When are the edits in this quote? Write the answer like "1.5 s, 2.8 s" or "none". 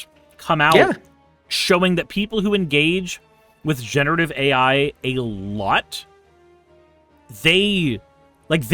none